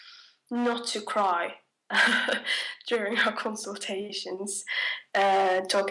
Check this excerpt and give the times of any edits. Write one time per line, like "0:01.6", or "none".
0:01.7